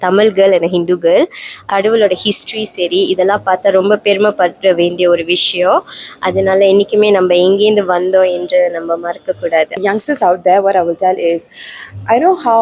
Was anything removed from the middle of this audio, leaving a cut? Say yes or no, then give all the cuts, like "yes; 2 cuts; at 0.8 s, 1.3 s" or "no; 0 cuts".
yes; 2 cuts; at 1.7 s, 9.8 s